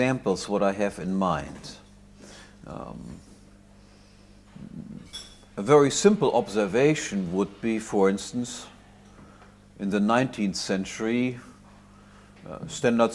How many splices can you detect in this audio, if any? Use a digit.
0